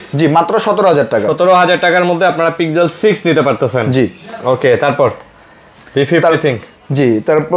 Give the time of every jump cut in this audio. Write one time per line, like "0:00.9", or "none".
none